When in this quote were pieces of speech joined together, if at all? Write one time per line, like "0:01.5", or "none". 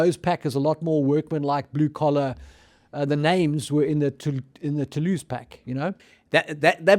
0:06.1

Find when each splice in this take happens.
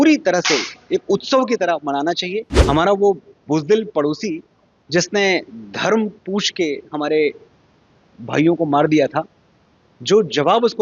0:02.5

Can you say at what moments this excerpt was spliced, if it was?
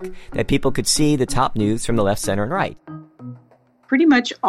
0:03.4

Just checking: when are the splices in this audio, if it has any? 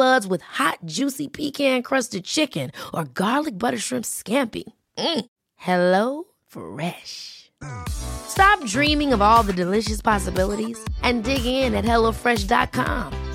none

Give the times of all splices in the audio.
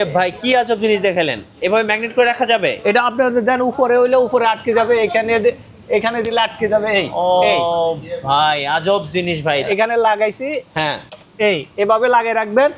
0:09.6

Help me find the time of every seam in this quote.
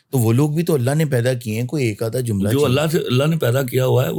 none

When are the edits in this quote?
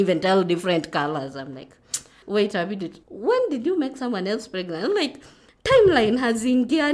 0:02.2

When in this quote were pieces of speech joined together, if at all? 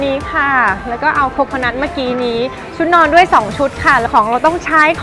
none

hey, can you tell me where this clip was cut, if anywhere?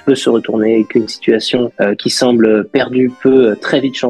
none

